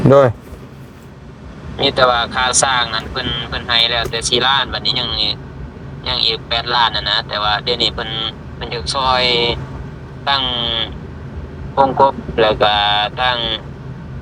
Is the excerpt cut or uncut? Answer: uncut